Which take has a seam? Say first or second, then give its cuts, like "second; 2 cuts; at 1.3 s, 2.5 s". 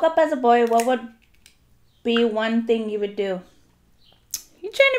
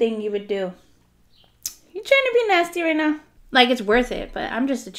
second; 1 cut; at 3.3 s